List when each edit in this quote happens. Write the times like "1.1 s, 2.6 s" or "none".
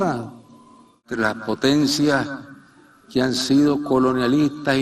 1.1 s